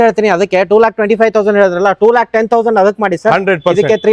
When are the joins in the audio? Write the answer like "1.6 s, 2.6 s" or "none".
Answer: none